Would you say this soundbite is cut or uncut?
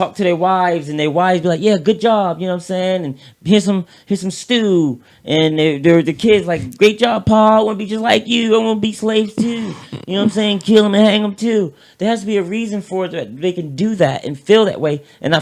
uncut